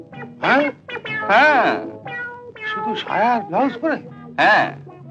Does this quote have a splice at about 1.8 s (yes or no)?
no